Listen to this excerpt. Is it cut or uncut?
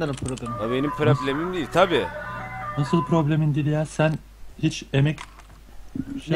uncut